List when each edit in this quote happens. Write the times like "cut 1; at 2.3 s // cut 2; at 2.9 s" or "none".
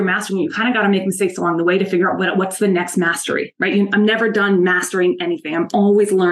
none